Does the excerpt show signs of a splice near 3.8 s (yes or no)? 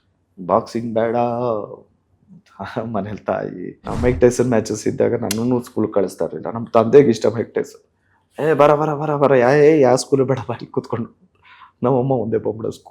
yes